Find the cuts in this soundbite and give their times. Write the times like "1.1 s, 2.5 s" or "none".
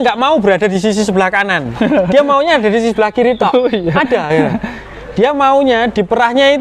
none